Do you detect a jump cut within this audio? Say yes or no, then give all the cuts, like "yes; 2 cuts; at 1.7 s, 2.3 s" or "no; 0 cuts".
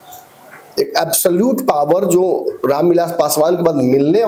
no; 0 cuts